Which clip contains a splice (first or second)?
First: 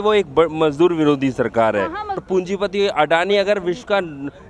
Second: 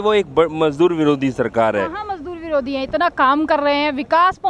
first